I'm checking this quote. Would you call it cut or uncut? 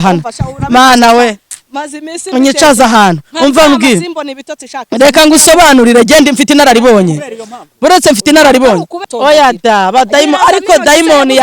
cut